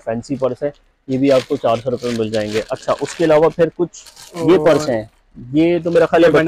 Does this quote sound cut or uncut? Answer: uncut